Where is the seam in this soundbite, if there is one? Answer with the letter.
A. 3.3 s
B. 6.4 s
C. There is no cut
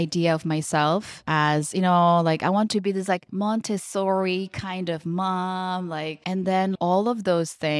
B